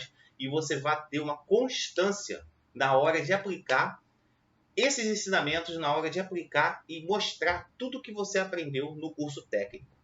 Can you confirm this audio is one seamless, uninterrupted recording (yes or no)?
yes